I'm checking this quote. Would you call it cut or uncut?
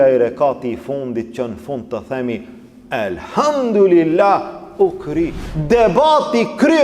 cut